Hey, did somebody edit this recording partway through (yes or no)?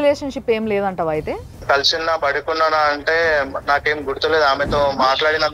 yes